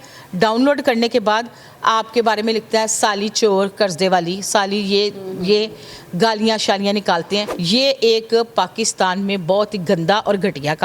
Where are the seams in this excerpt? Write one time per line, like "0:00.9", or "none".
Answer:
0:07.5